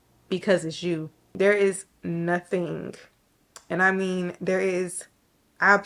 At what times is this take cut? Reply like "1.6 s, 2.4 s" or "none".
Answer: 1.2 s